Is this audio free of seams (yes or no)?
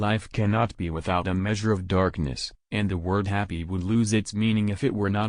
yes